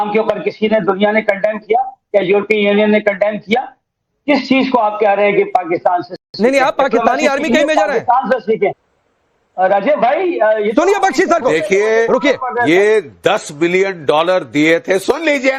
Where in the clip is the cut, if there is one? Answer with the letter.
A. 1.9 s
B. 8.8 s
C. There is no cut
B